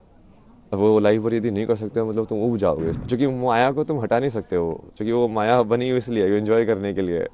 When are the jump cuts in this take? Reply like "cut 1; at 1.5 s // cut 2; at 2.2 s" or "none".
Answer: cut 1; at 3.0 s